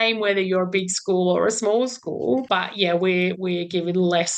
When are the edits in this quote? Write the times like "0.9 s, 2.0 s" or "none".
2.4 s, 3.4 s